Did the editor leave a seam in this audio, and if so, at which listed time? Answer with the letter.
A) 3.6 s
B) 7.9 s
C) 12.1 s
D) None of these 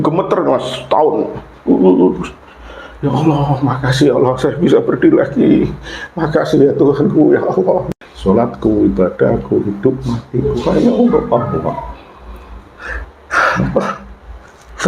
B